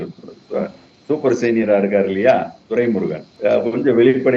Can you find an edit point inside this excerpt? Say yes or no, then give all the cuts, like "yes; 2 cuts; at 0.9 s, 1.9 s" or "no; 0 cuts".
yes; 1 cut; at 3.2 s